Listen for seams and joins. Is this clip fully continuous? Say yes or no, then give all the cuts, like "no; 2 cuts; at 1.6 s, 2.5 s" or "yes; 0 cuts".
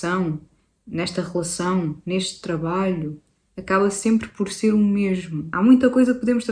no; 1 cut; at 5.4 s